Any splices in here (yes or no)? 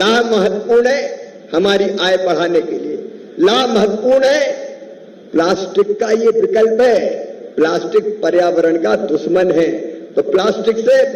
no